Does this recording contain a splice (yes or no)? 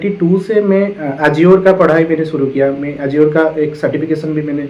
no